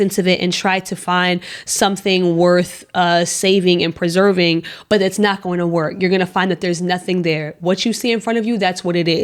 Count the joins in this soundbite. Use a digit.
0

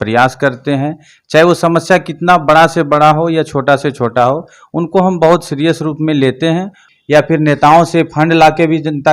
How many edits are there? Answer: 1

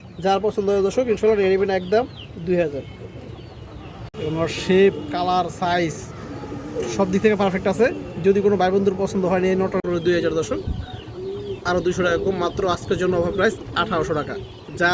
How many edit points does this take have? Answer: 2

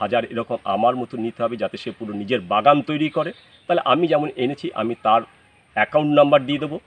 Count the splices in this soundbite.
0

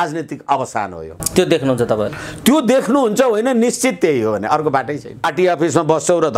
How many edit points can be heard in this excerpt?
2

